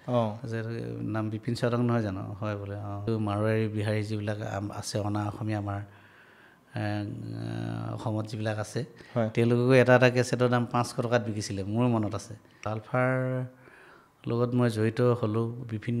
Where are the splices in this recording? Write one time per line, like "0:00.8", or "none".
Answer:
0:03.0
0:12.6